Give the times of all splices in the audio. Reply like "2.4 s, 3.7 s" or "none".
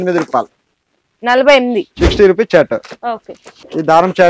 1.9 s